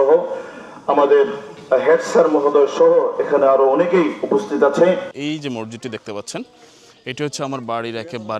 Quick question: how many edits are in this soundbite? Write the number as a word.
one